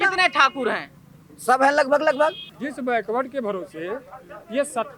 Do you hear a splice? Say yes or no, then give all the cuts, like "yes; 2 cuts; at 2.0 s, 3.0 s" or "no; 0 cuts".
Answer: yes; 1 cut; at 2.5 s